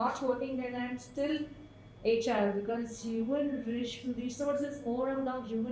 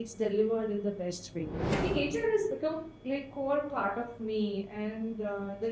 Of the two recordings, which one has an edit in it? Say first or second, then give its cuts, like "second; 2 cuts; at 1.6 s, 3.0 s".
second; 1 cut; at 1.7 s